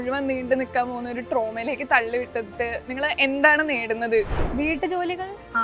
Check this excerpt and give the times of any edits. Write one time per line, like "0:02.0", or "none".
0:04.4